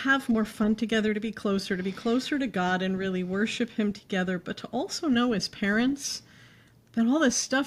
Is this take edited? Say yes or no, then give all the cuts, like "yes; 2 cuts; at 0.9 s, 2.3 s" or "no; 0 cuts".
no; 0 cuts